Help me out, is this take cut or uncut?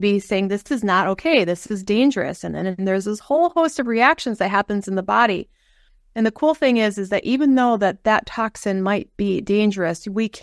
uncut